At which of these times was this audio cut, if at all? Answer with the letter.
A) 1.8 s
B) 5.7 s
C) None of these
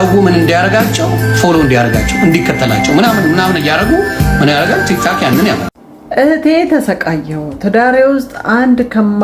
B